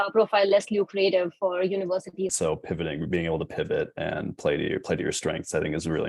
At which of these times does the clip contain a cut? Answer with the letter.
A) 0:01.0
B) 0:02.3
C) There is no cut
B